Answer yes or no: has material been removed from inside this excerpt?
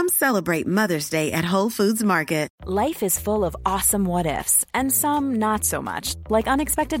yes